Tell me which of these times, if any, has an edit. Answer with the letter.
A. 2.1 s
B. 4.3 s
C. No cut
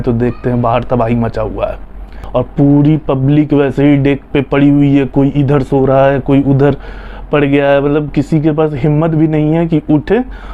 A